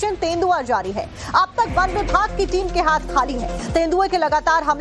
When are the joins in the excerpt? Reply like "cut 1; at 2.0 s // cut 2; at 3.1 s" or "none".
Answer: cut 1; at 3.5 s